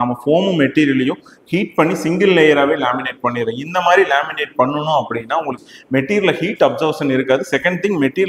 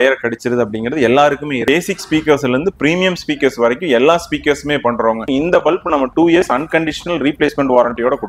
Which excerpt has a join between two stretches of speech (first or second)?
second